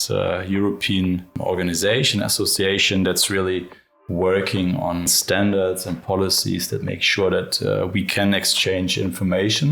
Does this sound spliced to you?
yes; 2 cuts; at 1.3 s, 5.1 s

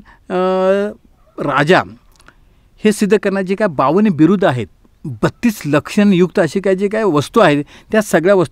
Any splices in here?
no; 0 cuts

